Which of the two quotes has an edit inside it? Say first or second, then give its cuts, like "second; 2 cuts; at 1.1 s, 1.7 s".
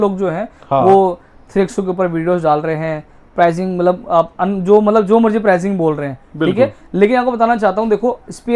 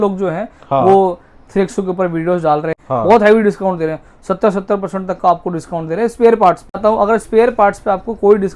second; 2 cuts; at 2.8 s, 6.8 s